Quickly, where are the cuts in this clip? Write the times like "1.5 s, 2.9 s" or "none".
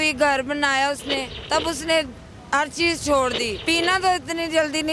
1.3 s, 3.6 s